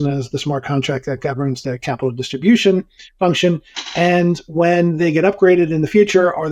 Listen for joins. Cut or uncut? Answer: uncut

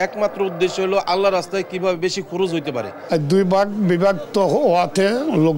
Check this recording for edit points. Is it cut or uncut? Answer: cut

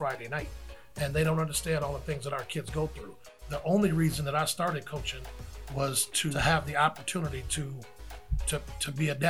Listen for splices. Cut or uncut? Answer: cut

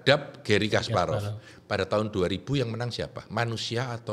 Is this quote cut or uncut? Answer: uncut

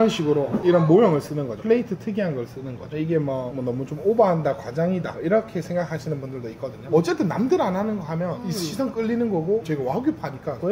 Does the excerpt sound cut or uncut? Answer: uncut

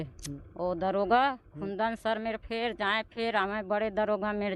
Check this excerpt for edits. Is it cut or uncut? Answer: uncut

